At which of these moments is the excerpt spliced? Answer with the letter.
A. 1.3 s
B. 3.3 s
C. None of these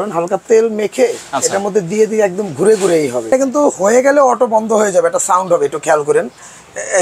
B